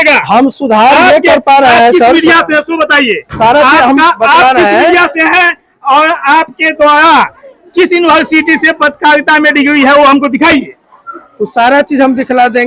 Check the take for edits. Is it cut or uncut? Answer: uncut